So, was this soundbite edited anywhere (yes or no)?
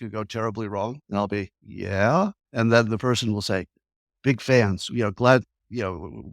yes